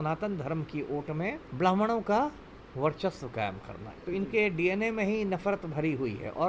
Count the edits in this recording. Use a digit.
2